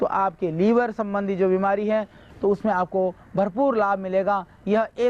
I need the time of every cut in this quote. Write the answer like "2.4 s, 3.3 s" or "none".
2.3 s